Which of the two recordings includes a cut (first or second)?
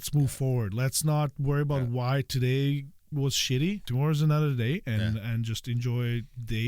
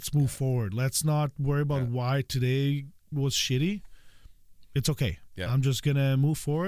first